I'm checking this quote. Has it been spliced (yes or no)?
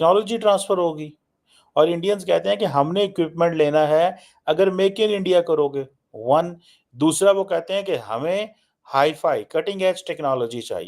no